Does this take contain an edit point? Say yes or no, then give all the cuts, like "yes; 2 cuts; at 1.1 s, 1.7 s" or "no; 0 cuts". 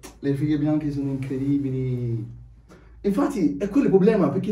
yes; 1 cut; at 2.8 s